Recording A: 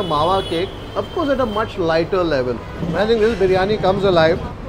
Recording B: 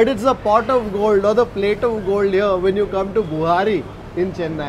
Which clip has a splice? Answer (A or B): A